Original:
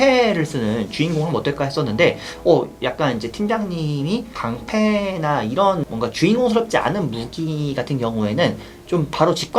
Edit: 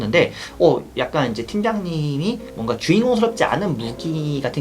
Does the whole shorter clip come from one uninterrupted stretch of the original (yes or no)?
no